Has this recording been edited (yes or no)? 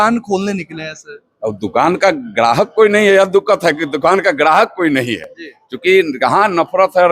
no